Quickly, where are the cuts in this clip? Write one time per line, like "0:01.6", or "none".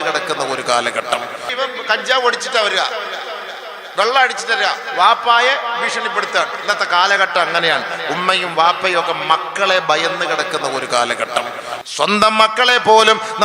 0:01.4
0:11.7

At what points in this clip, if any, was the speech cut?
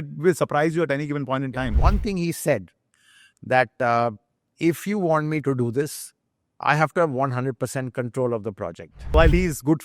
0:01.7
0:09.0

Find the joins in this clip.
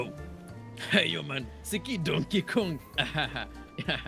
none

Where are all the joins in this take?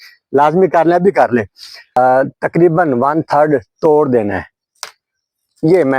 0:02.0

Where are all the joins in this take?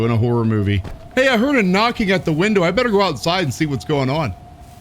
0:00.9

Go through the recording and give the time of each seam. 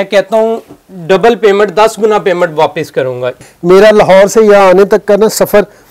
0:03.4

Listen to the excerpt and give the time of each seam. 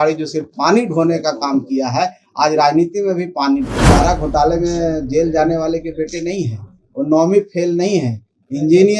0:03.8

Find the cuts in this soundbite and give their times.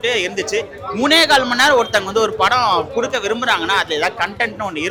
none

